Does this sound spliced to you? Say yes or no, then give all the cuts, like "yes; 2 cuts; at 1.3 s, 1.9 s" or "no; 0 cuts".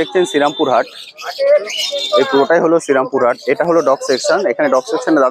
no; 0 cuts